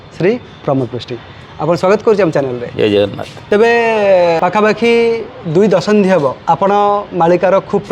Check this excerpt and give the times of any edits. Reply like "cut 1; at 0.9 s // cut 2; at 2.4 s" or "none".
cut 1; at 3.3 s // cut 2; at 4.4 s // cut 3; at 6.4 s